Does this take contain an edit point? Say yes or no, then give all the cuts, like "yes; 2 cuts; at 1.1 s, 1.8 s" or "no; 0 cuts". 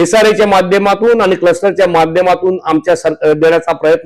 no; 0 cuts